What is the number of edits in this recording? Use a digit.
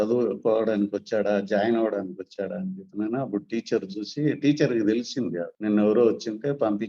1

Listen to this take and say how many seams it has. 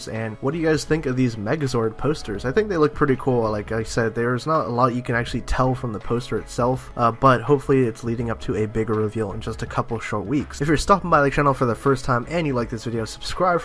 0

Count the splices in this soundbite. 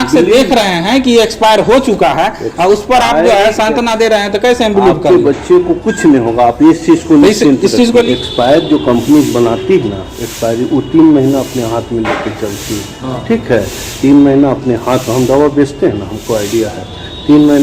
2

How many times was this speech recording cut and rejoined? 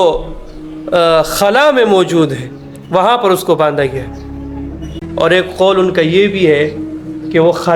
1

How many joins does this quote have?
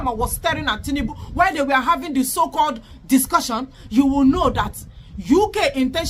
0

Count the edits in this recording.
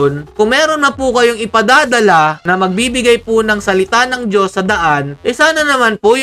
0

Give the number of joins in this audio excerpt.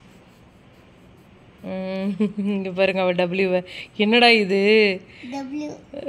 0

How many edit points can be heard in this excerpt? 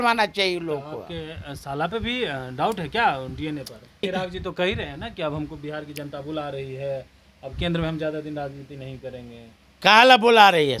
1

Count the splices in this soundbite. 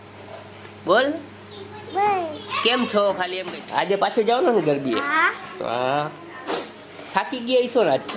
1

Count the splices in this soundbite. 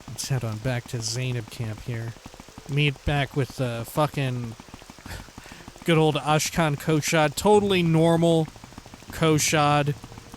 1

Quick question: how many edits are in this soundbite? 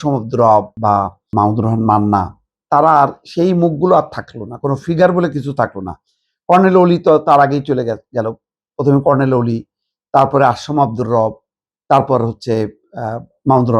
1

